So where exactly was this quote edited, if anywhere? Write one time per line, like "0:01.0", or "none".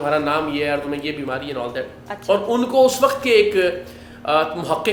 none